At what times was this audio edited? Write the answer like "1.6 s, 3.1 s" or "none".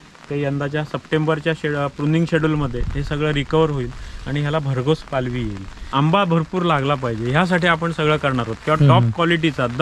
5.8 s